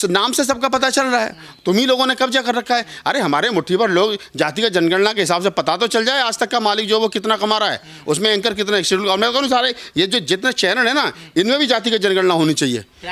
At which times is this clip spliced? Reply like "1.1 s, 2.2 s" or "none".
none